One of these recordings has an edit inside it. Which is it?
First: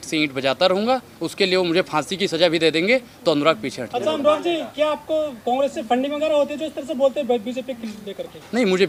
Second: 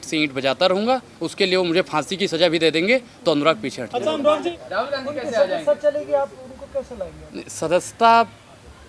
second; 1 cut; at 4.6 s

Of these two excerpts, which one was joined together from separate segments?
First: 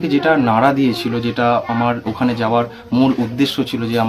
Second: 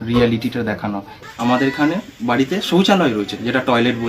second; 1 cut; at 1.1 s

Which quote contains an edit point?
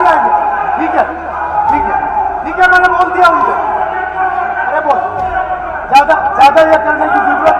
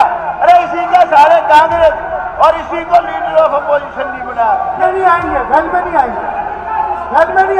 second; 1 cut; at 4.8 s

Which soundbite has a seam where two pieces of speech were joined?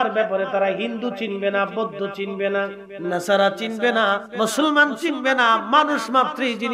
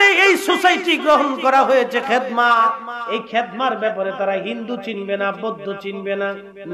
first; 1 cut; at 4.3 s

